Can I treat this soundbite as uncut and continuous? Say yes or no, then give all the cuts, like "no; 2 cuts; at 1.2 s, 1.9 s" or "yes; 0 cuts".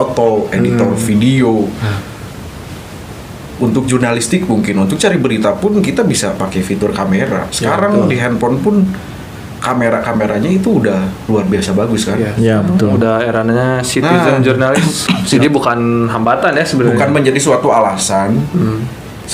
no; 1 cut; at 15.4 s